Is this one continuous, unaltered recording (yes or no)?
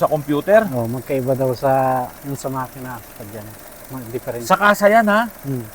yes